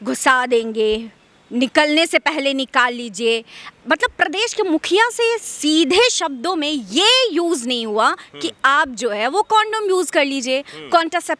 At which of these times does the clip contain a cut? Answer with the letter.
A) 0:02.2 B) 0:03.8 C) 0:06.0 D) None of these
B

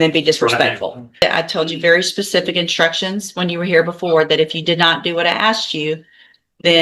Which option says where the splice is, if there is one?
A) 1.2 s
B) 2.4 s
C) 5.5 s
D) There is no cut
A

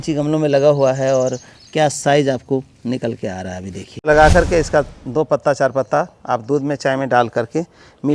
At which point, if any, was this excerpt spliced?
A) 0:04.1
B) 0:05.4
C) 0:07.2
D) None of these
A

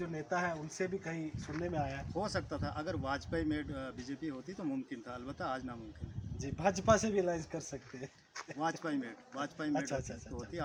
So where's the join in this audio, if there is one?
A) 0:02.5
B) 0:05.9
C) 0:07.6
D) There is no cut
D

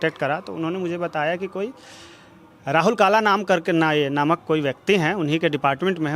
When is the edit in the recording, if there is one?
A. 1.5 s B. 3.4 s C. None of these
C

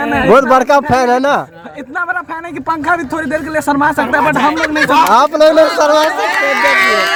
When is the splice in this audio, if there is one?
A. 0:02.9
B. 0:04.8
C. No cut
C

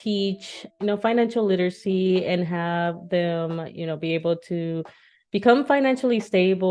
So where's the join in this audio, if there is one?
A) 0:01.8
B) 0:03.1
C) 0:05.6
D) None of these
D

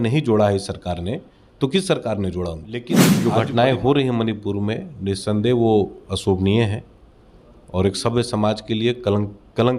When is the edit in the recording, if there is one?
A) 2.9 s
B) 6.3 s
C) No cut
A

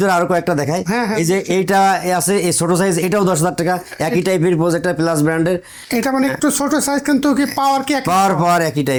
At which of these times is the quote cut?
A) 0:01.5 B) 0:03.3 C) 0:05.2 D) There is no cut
D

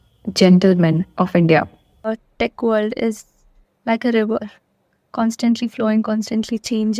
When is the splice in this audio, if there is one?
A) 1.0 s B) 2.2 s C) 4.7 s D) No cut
B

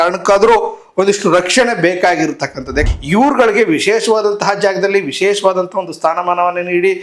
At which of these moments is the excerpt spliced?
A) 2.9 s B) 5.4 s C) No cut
A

